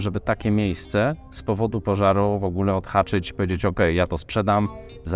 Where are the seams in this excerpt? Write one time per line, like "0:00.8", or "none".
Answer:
none